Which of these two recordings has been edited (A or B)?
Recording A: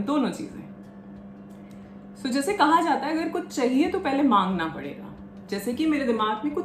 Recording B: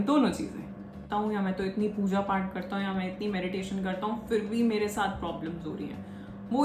B